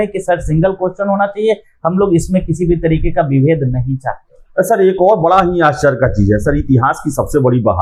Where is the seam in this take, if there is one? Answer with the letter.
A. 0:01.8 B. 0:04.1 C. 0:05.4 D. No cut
D